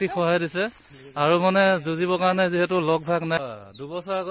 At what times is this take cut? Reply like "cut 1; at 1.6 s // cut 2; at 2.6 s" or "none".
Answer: cut 1; at 3.3 s